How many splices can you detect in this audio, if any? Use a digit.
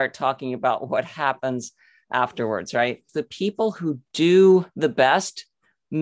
2